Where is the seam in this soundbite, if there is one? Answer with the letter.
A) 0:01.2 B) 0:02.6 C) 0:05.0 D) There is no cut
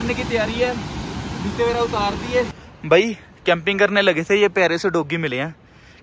B